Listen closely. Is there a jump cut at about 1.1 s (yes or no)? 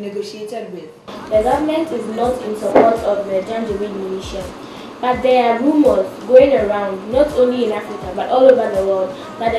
yes